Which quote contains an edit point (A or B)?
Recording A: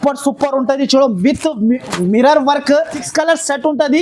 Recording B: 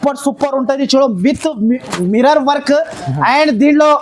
A